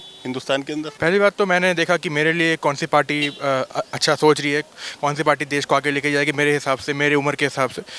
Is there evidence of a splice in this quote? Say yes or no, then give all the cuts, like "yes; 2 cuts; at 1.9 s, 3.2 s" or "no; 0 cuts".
yes; 1 cut; at 0.9 s